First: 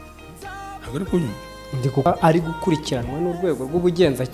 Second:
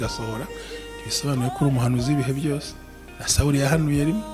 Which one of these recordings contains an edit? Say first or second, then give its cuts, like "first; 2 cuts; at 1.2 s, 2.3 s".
first; 1 cut; at 2.1 s